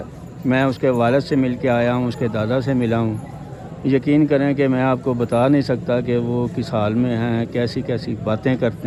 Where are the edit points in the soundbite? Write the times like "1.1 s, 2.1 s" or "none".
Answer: none